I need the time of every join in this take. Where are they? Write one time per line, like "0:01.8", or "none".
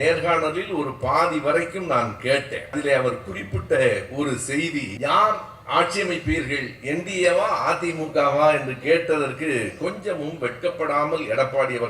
0:02.8
0:04.9